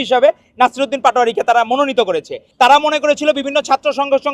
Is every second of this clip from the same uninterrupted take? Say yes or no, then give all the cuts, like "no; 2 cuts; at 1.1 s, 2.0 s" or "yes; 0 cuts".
no; 1 cut; at 2.4 s